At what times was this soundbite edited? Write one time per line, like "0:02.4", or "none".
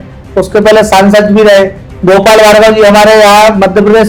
none